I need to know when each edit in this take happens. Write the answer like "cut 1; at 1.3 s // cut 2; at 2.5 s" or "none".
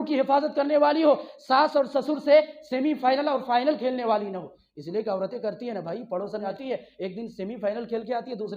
cut 1; at 6.5 s

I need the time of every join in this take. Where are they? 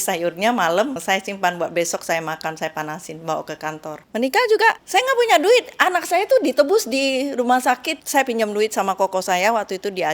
cut 1; at 1.0 s // cut 2; at 4.0 s // cut 3; at 4.8 s // cut 4; at 7.9 s

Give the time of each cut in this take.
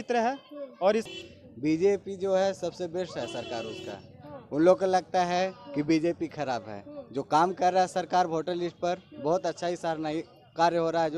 cut 1; at 1.1 s

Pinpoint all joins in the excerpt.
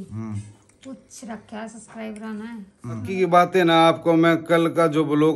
cut 1; at 3.1 s

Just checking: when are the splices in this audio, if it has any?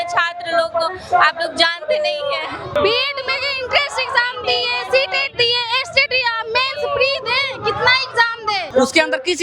cut 1; at 2.7 s // cut 2; at 8.7 s

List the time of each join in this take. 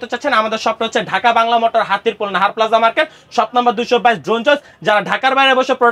none

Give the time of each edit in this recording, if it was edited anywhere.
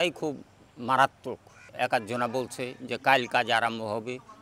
cut 1; at 1.6 s

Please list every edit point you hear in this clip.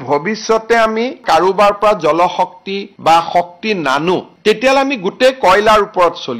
cut 1; at 1.2 s

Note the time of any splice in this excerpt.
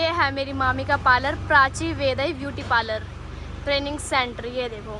none

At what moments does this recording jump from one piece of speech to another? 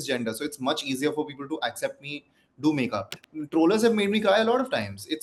cut 1; at 3.1 s

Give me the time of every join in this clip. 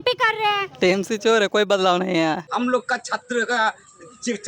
cut 1; at 2.5 s

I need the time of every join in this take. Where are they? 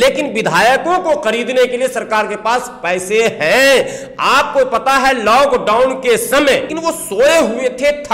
cut 1; at 6.7 s

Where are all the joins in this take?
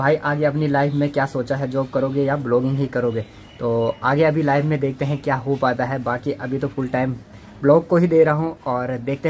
none

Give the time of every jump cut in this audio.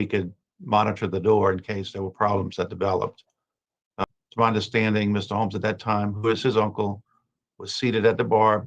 cut 1; at 4.0 s

